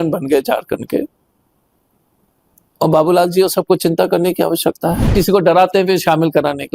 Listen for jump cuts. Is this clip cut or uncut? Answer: cut